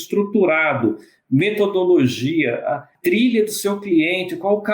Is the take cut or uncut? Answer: cut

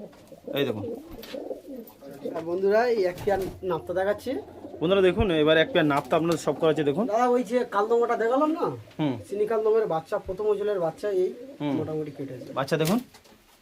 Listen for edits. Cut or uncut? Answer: cut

